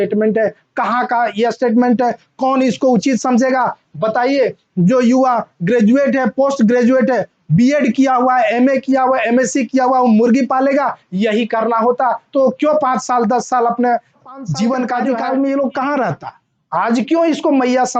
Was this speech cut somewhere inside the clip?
yes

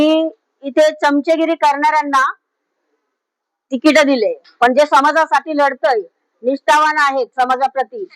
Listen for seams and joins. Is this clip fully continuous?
yes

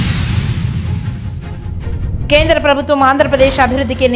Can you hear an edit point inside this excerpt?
yes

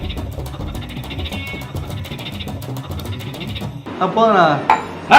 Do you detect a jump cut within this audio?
yes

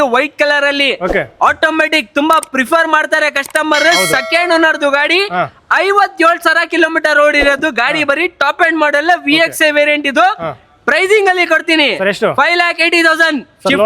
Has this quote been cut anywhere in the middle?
no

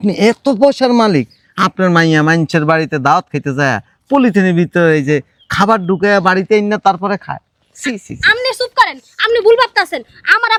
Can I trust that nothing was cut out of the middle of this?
yes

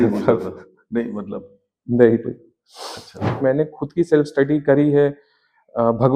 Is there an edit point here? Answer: yes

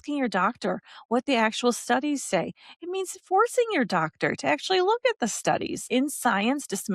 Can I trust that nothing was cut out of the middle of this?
no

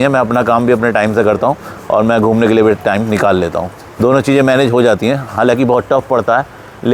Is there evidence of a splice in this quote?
no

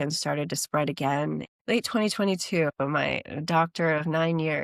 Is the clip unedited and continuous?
no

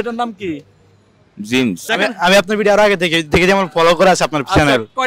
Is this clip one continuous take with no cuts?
no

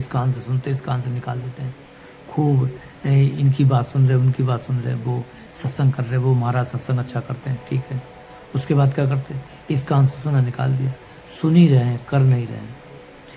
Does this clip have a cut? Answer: no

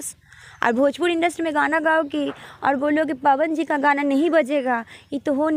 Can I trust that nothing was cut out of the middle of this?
yes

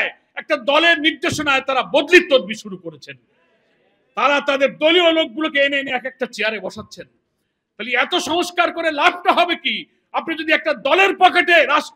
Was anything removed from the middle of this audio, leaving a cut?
no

